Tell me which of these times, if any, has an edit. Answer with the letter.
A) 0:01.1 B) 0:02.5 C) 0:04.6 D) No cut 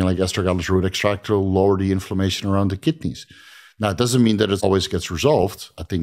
C